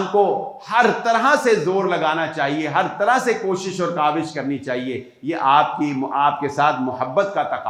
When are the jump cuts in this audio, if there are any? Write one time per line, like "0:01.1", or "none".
none